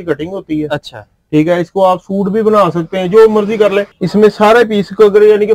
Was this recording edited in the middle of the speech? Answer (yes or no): yes